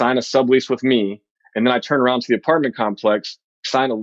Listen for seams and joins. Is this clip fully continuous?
yes; 0 cuts

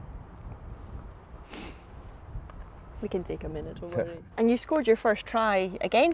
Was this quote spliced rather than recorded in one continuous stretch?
yes; 1 cut; at 4.2 s

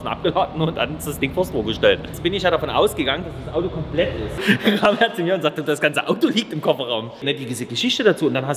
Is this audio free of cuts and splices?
no; 3 cuts; at 2.1 s, 4.3 s, 7.2 s

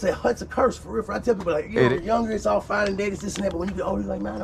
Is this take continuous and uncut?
no; 1 cut; at 1.9 s

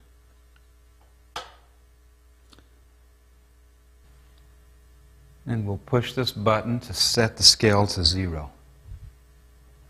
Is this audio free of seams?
no; 1 cut; at 6.6 s

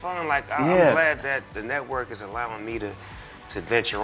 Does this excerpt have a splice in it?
no; 0 cuts

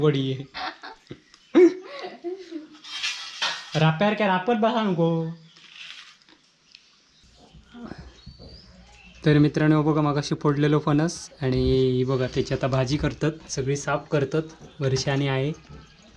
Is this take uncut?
no; 1 cut; at 7.1 s

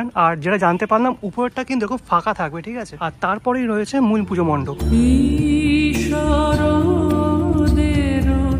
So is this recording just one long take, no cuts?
yes; 0 cuts

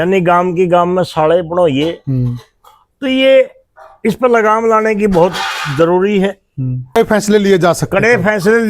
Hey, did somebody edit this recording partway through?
yes; 1 cut; at 7.0 s

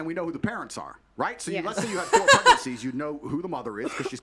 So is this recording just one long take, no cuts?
yes; 0 cuts

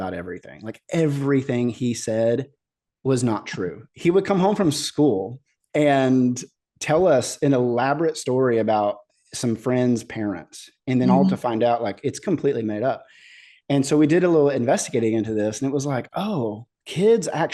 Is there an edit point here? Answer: yes; 1 cut; at 3.7 s

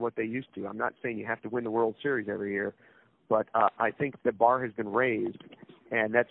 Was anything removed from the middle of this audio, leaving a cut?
no; 0 cuts

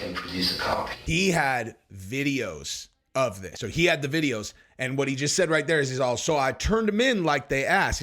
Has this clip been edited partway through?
yes; 2 cuts; at 1.0 s, 3.5 s

